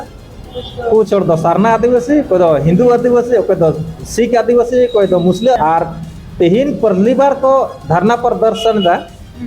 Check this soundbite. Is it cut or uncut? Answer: cut